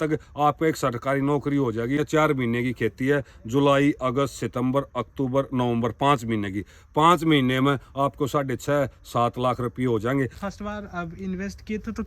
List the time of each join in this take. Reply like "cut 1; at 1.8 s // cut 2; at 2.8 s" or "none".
cut 1; at 2.0 s // cut 2; at 10.4 s